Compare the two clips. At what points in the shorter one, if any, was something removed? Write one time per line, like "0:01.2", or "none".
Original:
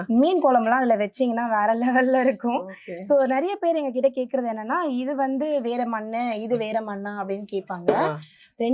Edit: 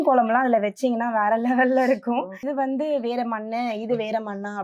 0:02.4

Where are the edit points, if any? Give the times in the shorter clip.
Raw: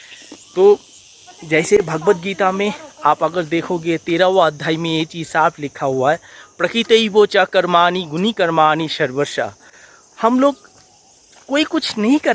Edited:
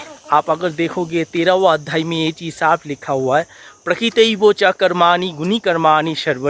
none

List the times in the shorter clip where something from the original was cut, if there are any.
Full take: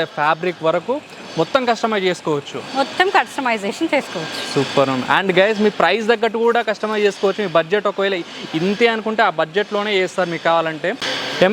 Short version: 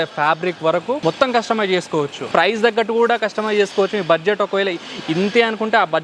0:01.0
0:02.3

